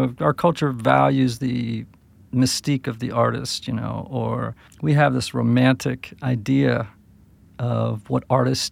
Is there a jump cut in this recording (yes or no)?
yes